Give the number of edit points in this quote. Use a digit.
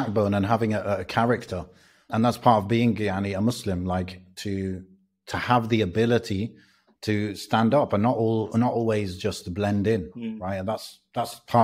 1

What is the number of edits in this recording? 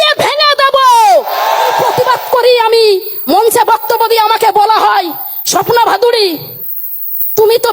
1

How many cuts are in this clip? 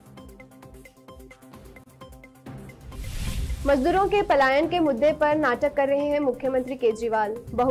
2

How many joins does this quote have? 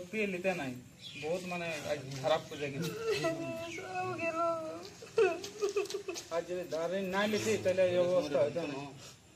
0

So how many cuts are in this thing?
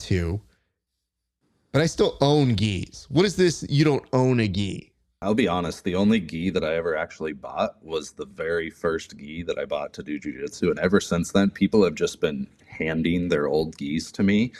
1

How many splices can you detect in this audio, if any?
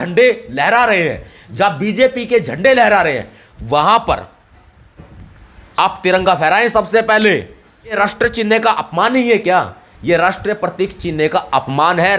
1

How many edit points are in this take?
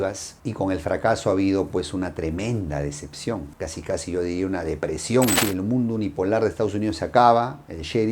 1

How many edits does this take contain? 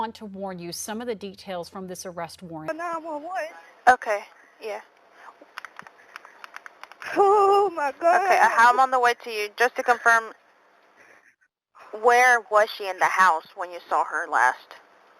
1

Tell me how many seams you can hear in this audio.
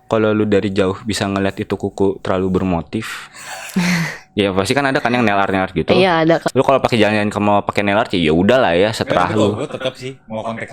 1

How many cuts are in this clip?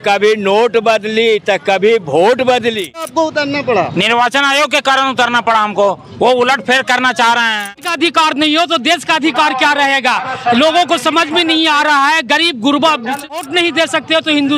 3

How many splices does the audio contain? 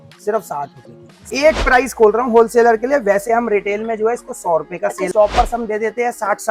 2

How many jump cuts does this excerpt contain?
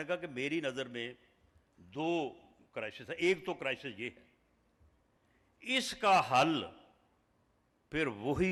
0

